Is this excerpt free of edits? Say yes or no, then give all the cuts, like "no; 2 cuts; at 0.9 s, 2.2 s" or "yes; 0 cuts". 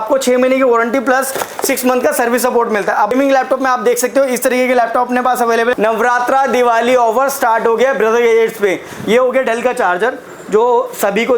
no; 3 cuts; at 3.1 s, 5.7 s, 8.9 s